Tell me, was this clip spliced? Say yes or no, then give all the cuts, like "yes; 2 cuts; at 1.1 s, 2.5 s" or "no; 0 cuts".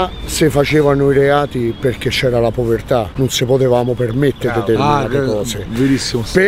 yes; 1 cut; at 3.1 s